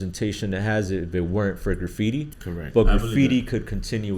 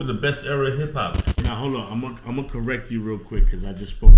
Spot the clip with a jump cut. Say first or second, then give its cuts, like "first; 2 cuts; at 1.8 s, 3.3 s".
second; 1 cut; at 1.4 s